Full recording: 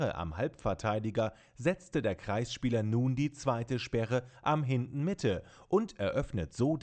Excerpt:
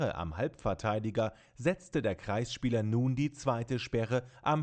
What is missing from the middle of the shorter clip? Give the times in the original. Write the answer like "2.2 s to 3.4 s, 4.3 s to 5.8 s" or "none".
none